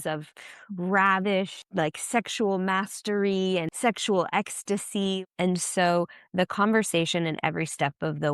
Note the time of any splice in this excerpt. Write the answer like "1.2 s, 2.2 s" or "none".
1.6 s, 3.7 s, 5.2 s